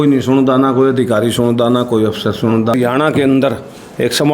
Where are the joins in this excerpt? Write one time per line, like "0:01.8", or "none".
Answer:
0:02.7